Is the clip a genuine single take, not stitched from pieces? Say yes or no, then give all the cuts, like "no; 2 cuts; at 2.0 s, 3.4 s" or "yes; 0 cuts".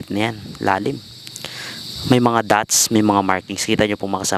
yes; 0 cuts